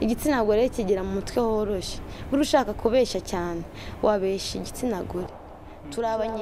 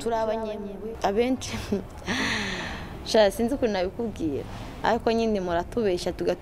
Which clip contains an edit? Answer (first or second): second